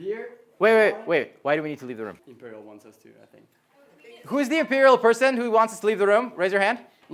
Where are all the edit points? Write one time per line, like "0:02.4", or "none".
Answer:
0:02.3